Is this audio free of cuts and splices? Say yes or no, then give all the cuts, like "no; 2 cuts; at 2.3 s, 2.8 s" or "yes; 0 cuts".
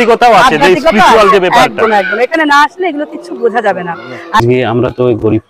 no; 1 cut; at 4.4 s